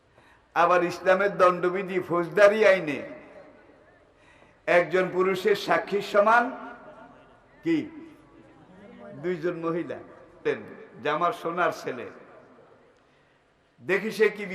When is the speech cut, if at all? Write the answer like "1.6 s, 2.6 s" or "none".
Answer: 10.4 s